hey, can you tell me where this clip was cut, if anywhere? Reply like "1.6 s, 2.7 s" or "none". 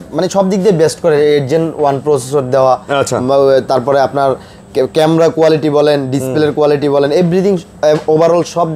none